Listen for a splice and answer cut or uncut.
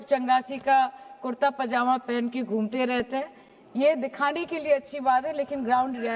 uncut